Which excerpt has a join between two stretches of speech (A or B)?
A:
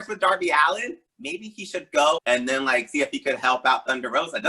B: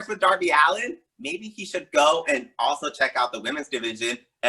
A